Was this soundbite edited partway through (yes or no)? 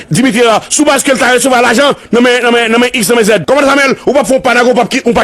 yes